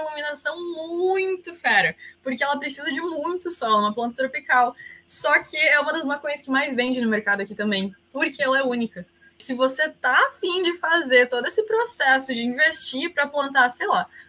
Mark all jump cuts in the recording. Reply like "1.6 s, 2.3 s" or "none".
9.4 s